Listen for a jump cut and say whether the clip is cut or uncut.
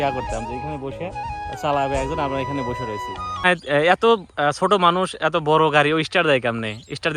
cut